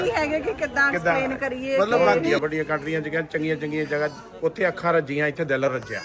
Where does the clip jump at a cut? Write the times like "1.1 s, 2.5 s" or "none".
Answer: 2.4 s